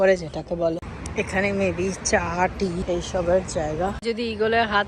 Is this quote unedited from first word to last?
no; 3 cuts; at 1.0 s, 2.8 s, 4.0 s

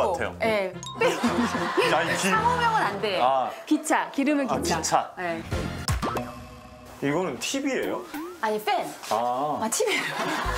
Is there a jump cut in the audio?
yes; 1 cut; at 5.9 s

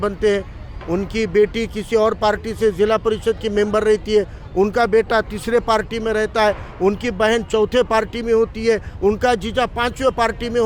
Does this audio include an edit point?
no; 0 cuts

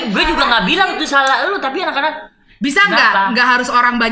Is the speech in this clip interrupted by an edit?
no; 0 cuts

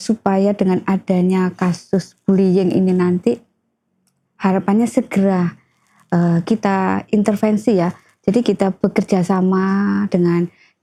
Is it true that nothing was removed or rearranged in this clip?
yes; 0 cuts

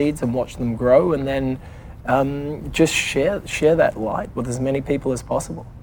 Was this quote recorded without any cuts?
yes; 0 cuts

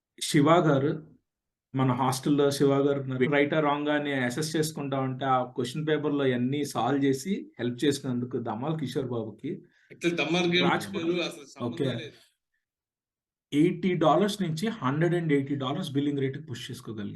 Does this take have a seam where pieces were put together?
yes; 2 cuts; at 3.3 s, 11.4 s

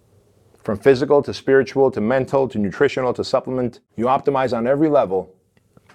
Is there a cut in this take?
yes; 1 cut; at 3.8 s

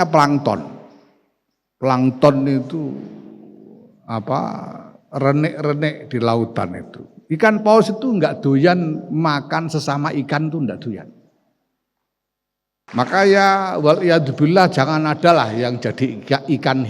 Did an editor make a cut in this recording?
yes; 1 cut; at 12.8 s

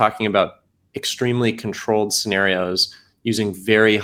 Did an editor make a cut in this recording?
no; 0 cuts

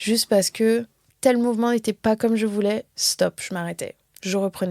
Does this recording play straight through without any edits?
no; 1 cut; at 1.0 s

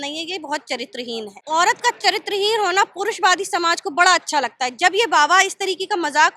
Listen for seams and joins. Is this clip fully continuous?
no; 1 cut; at 1.4 s

